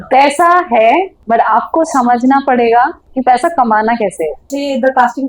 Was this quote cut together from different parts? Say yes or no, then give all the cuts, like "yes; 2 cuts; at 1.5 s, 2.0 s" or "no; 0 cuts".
yes; 3 cuts; at 1.2 s, 3.0 s, 4.5 s